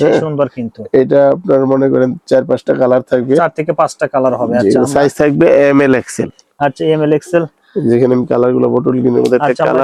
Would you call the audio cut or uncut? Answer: uncut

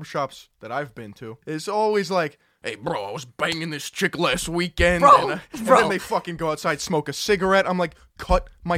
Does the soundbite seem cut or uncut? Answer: cut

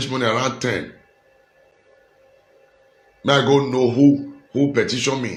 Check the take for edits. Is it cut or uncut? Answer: uncut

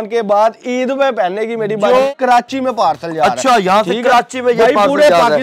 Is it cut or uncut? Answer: cut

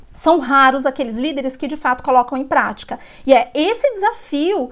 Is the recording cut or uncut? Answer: uncut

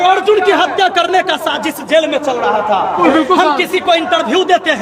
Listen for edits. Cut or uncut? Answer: cut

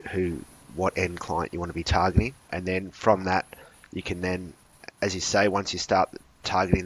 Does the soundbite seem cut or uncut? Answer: cut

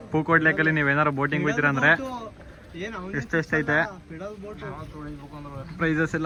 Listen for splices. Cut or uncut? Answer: uncut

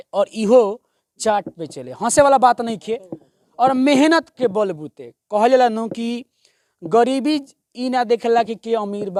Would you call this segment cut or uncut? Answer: uncut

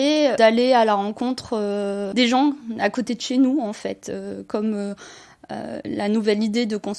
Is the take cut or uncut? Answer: uncut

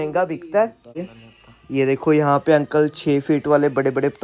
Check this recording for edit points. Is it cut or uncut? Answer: cut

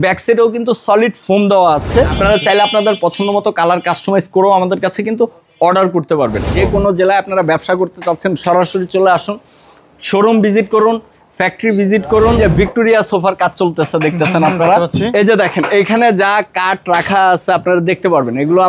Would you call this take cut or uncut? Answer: cut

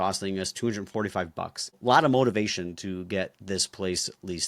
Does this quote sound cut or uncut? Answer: cut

